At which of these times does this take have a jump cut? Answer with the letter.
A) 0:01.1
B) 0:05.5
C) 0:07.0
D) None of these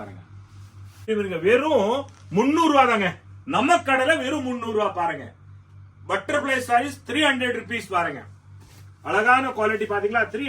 A